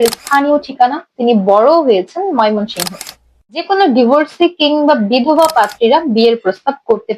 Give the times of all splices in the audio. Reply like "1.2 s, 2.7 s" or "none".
3.0 s